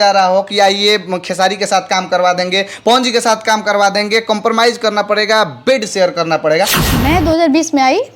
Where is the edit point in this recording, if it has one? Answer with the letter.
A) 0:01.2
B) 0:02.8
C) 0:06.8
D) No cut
C